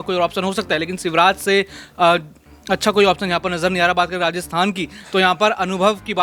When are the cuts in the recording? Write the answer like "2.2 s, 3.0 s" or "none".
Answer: none